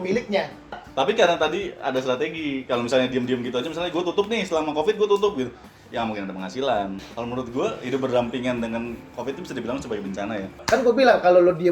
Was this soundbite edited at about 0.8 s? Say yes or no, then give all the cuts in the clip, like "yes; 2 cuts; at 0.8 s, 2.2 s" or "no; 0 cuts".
yes; 3 cuts; at 0.8 s, 7.0 s, 10.6 s